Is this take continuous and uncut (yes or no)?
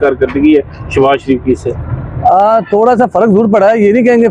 yes